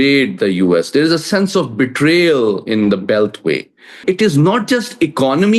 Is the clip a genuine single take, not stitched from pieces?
no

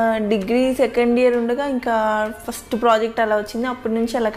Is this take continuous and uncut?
yes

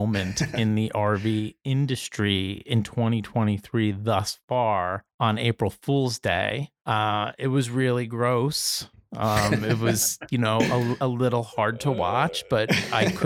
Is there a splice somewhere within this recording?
yes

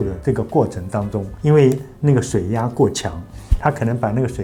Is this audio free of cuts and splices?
yes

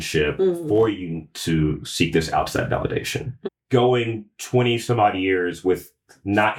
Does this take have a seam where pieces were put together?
no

